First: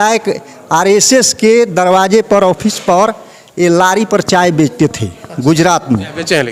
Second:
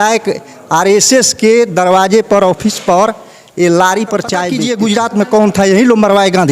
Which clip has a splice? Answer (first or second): second